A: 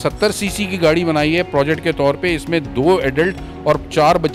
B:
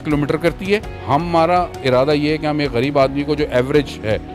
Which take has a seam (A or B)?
B